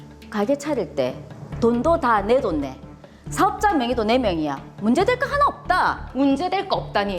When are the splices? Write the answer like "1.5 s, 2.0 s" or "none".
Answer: 6.0 s

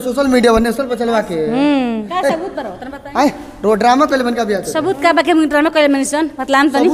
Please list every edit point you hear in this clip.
none

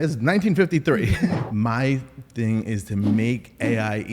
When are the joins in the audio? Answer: 1.4 s

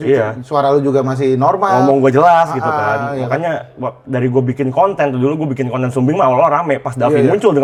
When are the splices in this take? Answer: none

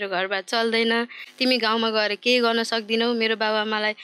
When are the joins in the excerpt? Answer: none

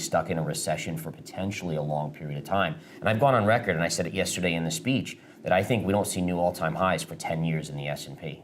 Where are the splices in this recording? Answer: none

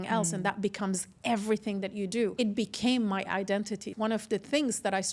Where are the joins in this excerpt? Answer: 2.3 s, 3.9 s

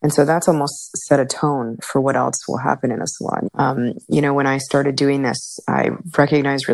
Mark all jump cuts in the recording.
1.8 s, 3.5 s

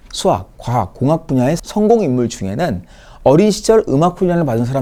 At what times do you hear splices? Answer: none

